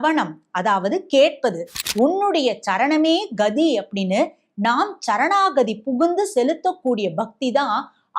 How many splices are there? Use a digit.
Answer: 1